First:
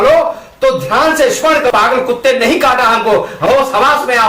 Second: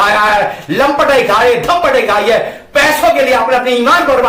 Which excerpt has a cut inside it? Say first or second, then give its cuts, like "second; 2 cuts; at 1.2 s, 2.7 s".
first; 2 cuts; at 1.7 s, 3.5 s